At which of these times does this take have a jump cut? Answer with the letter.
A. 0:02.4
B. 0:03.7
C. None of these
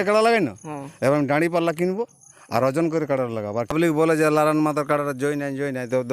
B